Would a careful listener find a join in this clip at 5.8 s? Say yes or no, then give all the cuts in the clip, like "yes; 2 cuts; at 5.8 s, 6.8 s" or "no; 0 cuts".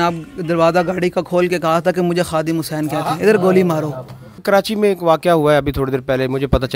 no; 1 cut; at 4.4 s